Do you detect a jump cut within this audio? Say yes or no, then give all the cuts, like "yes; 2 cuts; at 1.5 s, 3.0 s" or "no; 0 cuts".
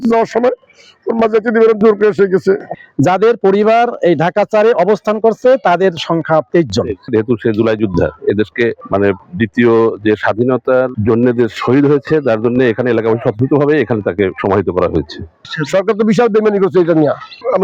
yes; 6 cuts; at 2.7 s, 7.1 s, 8.8 s, 11.0 s, 14.4 s, 15.3 s